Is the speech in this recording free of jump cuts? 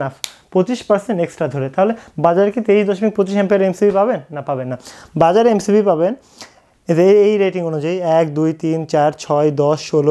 yes; 0 cuts

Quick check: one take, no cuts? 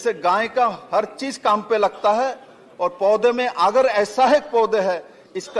yes; 0 cuts

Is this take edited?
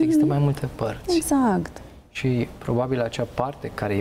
no; 0 cuts

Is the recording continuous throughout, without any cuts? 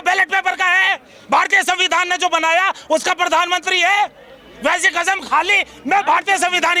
yes; 0 cuts

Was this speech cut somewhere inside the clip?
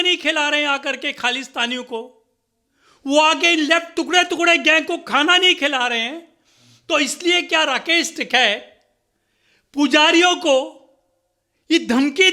no; 0 cuts

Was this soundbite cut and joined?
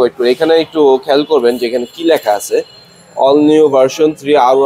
no; 0 cuts

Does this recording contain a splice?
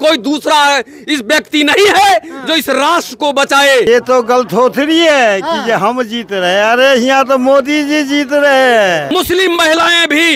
yes; 2 cuts; at 3.9 s, 9.1 s

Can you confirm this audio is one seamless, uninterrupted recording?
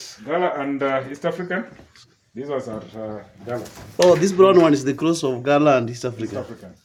yes; 0 cuts

